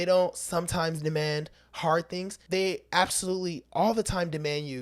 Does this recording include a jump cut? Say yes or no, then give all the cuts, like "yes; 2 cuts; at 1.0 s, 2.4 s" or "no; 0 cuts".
yes; 1 cut; at 2.3 s